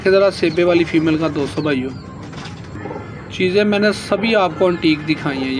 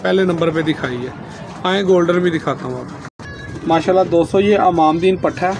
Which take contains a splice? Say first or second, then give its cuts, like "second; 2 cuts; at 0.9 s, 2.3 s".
first; 1 cut; at 2.7 s